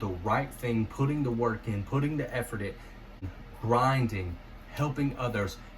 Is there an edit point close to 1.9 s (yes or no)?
no